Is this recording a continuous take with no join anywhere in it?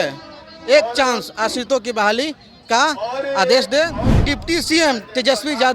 no; 1 cut; at 4.1 s

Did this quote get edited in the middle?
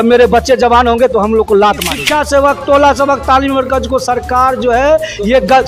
yes; 1 cut; at 1.9 s

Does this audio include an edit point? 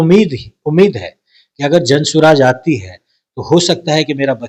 no; 0 cuts

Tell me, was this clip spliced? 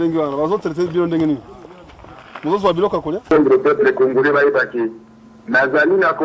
yes; 1 cut; at 3.3 s

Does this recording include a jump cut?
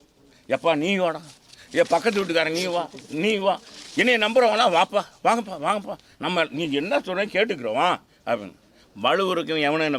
no; 0 cuts

